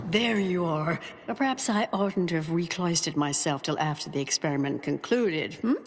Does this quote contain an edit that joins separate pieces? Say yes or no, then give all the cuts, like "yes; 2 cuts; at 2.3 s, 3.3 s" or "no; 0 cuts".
yes; 1 cut; at 1.1 s